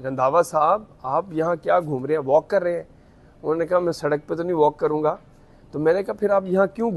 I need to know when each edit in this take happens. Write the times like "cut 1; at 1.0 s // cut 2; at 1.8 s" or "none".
none